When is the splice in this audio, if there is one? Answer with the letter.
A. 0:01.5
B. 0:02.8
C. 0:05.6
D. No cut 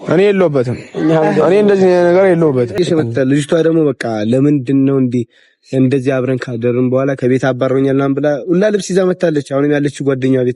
B